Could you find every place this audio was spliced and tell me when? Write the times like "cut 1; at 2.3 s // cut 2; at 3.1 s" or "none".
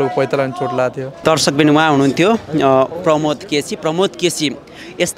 cut 1; at 1.2 s